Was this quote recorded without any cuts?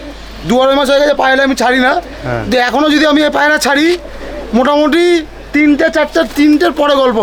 yes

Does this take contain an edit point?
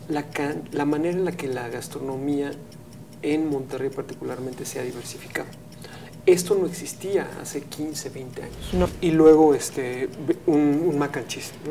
yes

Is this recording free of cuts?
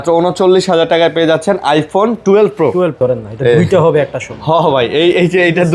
no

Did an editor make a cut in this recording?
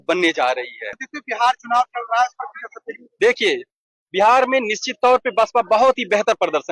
no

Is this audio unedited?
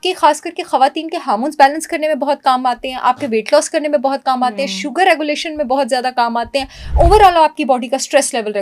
yes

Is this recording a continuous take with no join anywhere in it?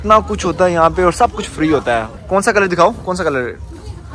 no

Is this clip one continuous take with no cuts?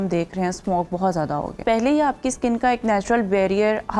no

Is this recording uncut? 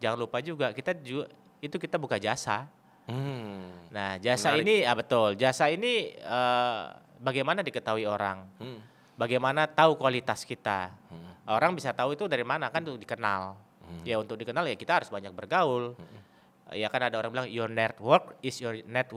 yes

